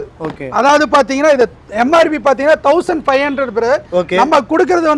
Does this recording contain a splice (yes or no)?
no